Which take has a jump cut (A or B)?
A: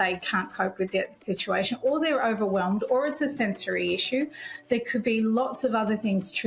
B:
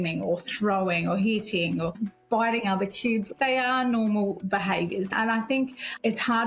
B